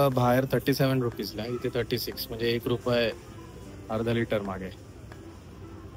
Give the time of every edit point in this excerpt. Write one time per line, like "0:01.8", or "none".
none